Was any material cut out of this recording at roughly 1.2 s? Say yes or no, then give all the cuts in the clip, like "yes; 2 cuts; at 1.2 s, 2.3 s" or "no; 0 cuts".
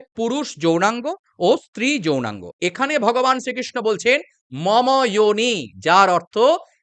no; 1 cut; at 2.4 s